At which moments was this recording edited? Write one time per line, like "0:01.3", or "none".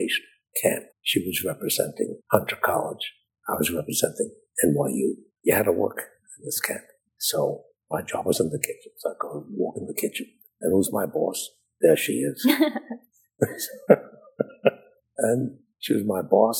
0:00.9
0:02.2
0:05.3